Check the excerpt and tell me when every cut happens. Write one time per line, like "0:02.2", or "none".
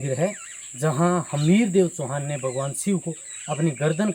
none